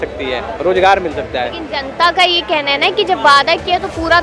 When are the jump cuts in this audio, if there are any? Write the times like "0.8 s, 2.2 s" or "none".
none